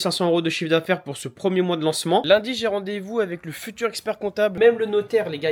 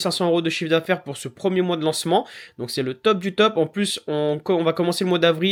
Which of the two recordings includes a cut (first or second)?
first